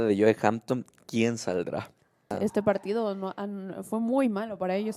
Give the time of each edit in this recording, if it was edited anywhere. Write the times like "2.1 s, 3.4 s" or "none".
2.3 s